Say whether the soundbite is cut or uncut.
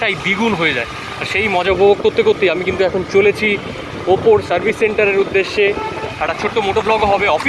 uncut